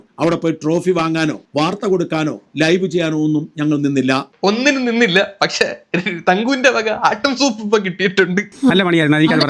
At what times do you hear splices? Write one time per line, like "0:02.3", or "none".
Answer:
0:08.5